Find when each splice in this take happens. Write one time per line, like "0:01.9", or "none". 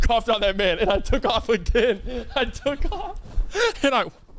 none